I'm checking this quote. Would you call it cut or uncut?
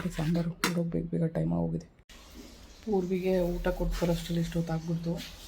uncut